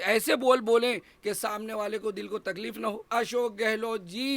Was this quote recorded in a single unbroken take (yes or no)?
no